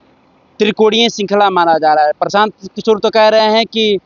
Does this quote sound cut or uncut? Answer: uncut